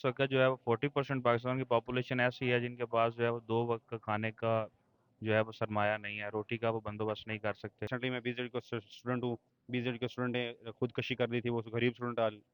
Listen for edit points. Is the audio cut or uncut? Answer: cut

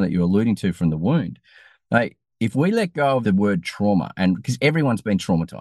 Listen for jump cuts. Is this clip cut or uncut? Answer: cut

